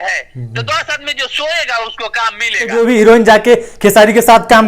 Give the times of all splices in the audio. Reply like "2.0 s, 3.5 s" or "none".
2.7 s